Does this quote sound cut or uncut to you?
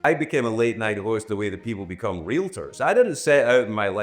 uncut